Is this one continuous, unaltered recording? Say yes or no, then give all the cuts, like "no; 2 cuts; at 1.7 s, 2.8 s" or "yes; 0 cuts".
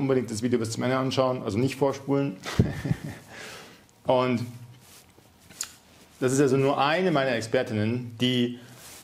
yes; 0 cuts